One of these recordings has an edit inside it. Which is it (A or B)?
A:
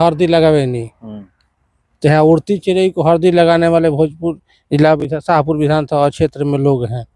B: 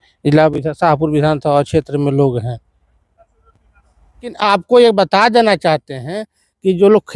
B